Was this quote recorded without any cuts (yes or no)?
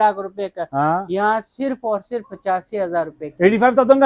yes